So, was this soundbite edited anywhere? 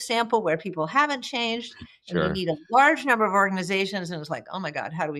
no; 0 cuts

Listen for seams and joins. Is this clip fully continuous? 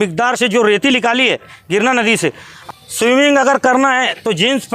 no; 1 cut; at 2.5 s

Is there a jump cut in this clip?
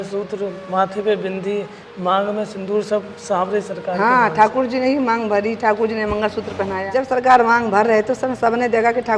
yes; 1 cut; at 6.9 s

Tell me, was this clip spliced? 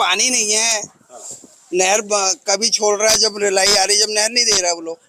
no; 0 cuts

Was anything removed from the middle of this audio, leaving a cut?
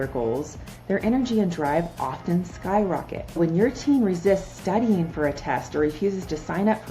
yes; 1 cut; at 3.4 s

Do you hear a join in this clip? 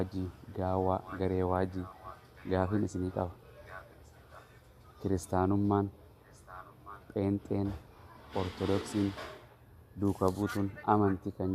no; 0 cuts

